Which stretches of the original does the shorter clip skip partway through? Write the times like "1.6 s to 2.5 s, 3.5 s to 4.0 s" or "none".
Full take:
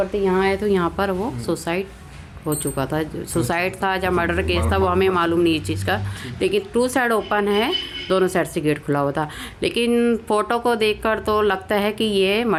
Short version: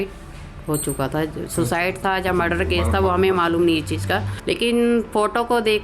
6.1 s to 9.5 s